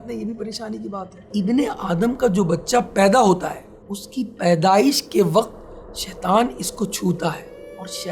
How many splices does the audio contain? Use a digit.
1